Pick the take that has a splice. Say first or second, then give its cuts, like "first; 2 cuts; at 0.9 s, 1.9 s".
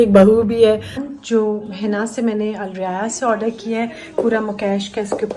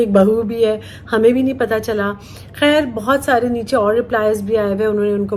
first; 1 cut; at 0.9 s